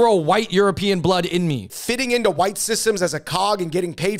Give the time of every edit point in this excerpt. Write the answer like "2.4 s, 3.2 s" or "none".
1.7 s